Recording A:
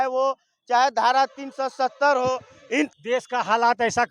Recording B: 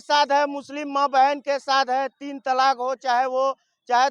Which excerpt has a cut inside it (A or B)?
A